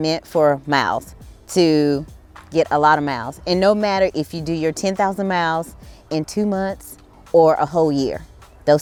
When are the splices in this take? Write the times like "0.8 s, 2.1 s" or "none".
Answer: none